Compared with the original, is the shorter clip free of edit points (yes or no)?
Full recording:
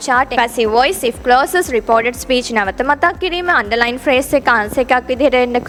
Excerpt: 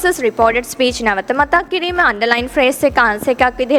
yes